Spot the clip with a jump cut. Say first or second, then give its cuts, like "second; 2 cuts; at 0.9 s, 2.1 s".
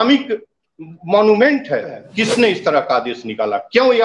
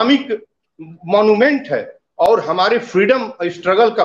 first; 1 cut; at 2.0 s